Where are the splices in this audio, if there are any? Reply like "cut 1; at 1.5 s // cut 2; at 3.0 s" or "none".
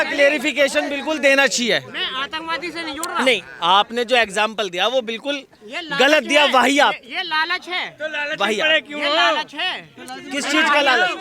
none